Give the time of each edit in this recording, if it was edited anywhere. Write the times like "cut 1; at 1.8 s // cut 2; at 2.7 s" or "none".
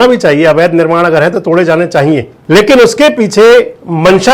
cut 1; at 2.3 s